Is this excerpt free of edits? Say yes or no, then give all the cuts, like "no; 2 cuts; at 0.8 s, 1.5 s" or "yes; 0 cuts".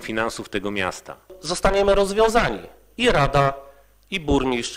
no; 1 cut; at 1.4 s